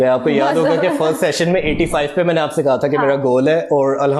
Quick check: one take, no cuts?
yes; 0 cuts

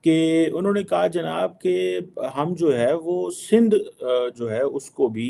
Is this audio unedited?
yes; 0 cuts

